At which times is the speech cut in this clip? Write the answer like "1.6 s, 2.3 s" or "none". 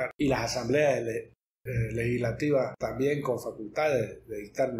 2.8 s